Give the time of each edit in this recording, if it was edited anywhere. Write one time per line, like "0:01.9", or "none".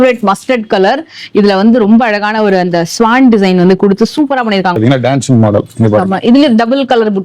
0:04.8